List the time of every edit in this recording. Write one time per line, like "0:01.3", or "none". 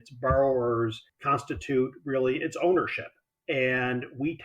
0:01.1